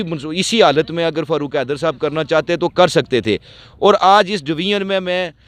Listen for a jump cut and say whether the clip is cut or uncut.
uncut